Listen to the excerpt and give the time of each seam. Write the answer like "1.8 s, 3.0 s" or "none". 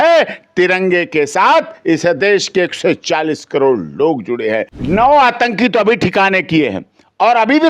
4.7 s